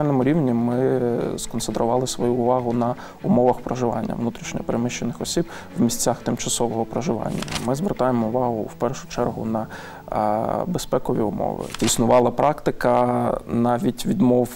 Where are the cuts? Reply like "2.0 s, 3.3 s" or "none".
7.5 s, 11.7 s